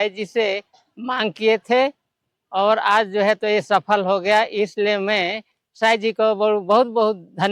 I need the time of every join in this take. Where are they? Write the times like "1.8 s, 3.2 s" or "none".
none